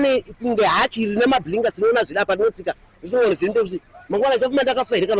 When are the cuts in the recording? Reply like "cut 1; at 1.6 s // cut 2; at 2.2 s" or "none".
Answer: none